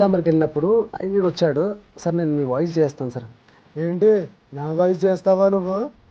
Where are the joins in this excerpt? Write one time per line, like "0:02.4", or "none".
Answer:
0:00.9